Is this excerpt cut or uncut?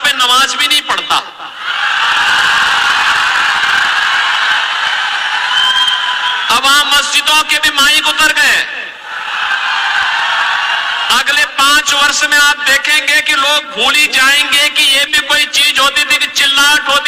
uncut